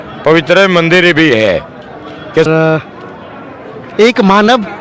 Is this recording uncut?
no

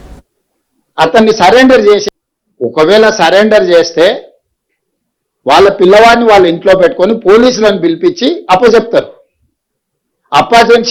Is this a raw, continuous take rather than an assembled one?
no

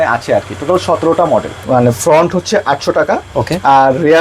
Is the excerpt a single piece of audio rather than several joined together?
no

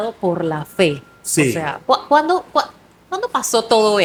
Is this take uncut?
yes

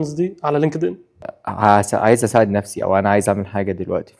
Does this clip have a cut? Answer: yes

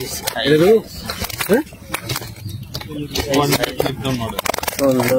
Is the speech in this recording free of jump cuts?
yes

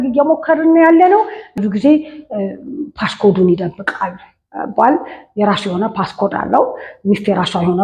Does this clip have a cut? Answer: yes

